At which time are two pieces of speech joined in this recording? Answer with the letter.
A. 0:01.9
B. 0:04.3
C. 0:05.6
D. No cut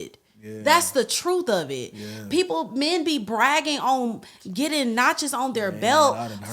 D